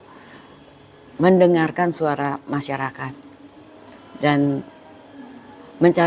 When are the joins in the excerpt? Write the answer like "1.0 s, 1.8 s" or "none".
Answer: none